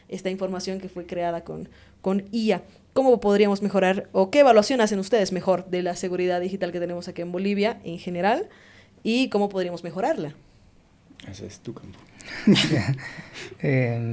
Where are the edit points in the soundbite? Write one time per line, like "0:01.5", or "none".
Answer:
none